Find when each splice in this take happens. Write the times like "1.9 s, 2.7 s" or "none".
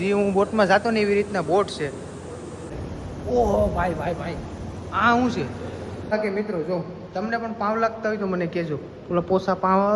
2.8 s, 6.1 s